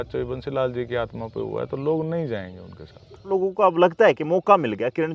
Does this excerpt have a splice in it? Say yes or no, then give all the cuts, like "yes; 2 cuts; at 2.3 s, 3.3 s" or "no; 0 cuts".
yes; 1 cut; at 3.3 s